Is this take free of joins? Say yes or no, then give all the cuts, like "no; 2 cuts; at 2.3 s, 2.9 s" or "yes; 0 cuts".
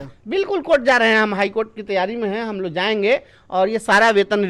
yes; 0 cuts